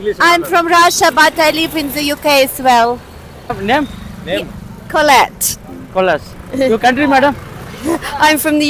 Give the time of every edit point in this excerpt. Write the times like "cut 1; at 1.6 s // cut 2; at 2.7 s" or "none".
cut 1; at 3.6 s